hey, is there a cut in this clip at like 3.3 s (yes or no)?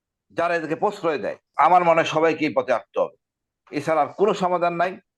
no